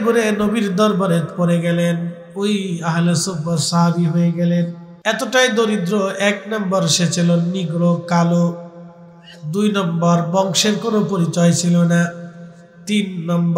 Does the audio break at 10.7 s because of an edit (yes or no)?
no